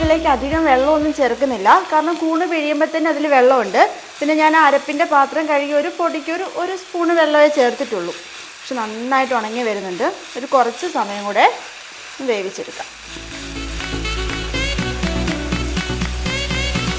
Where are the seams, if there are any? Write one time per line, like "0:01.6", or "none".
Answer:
none